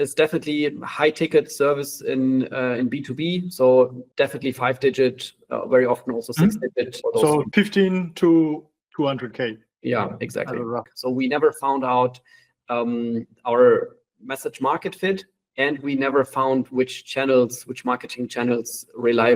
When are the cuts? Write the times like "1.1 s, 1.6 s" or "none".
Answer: 4.0 s, 7.0 s, 10.9 s